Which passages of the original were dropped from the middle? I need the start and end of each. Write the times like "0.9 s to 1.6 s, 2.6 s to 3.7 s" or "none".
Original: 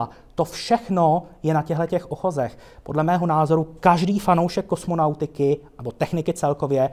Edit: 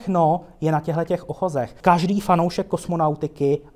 2.6 s to 3.7 s